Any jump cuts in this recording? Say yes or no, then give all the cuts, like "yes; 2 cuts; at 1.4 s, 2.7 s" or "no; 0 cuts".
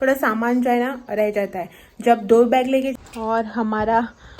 yes; 1 cut; at 2.9 s